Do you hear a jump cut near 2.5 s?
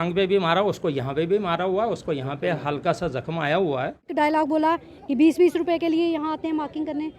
no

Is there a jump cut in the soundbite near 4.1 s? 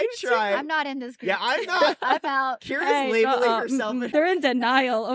yes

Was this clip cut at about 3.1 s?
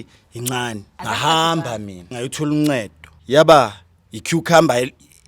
yes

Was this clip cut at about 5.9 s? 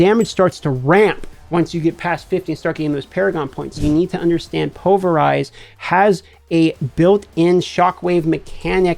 no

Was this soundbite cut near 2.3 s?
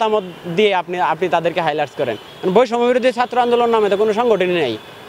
yes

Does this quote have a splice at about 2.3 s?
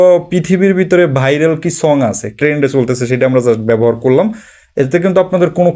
yes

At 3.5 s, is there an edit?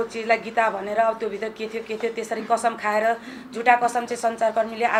no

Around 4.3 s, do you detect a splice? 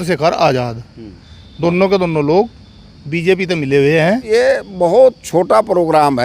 yes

